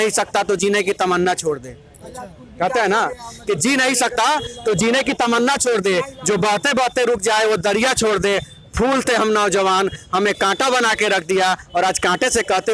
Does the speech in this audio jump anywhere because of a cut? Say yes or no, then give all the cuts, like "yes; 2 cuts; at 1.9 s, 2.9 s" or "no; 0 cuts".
no; 0 cuts